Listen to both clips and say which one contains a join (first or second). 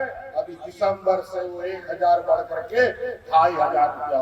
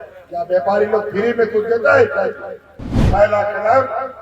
second